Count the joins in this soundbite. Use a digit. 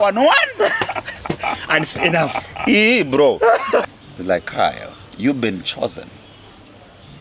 1